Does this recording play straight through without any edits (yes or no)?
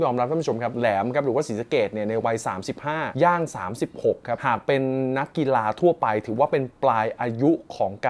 yes